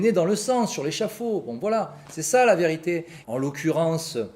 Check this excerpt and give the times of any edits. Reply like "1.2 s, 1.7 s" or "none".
3.1 s